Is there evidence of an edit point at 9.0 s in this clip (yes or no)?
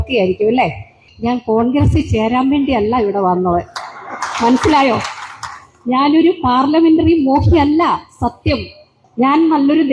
yes